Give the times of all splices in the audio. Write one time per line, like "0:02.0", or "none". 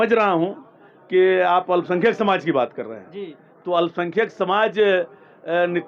none